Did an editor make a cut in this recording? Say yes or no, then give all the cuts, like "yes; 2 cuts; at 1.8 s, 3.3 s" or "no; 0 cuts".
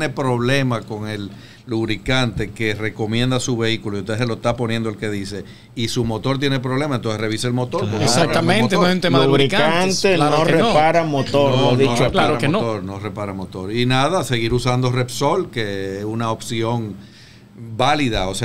no; 0 cuts